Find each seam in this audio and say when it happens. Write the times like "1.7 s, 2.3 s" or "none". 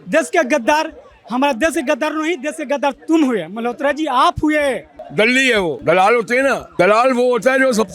4.9 s, 5.8 s, 6.7 s